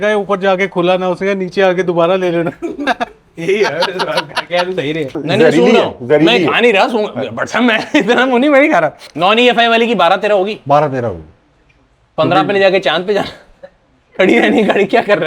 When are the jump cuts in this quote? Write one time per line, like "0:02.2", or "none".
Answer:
0:05.2
0:08.9